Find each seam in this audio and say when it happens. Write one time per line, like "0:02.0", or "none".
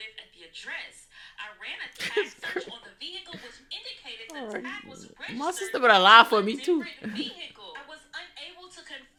none